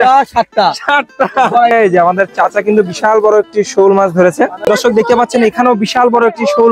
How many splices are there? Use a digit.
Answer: 2